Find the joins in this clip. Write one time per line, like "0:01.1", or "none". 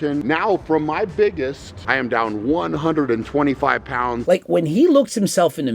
0:01.7
0:04.2

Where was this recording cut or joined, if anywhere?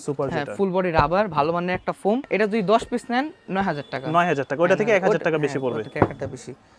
none

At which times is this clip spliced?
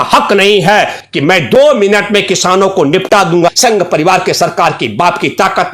0:01.0
0:03.5

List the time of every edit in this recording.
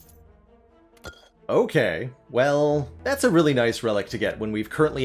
0:02.9

